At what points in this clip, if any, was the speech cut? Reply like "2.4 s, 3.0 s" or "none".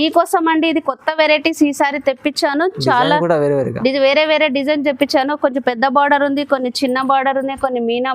none